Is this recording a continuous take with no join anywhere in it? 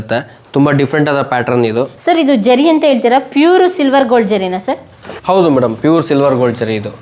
yes; 0 cuts

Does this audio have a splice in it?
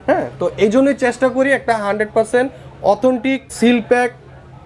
yes; 1 cut; at 3.5 s

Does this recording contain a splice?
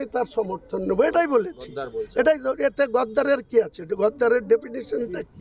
no; 0 cuts

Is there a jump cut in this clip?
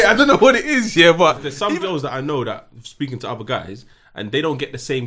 yes; 1 cut; at 1.5 s

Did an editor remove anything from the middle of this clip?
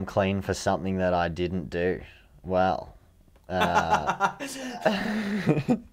no; 0 cuts

